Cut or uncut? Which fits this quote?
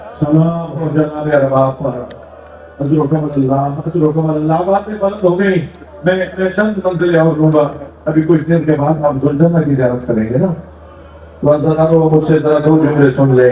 uncut